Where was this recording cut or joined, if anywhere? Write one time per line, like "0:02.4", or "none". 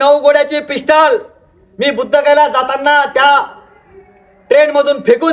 none